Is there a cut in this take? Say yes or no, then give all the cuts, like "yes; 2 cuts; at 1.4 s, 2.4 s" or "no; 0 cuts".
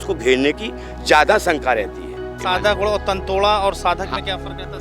yes; 1 cut; at 2.4 s